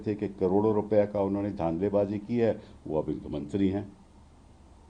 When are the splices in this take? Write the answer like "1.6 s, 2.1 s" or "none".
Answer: none